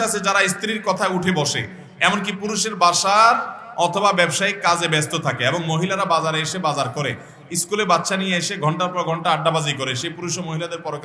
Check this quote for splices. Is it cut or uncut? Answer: uncut